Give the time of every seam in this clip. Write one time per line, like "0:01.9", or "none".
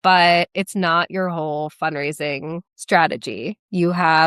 none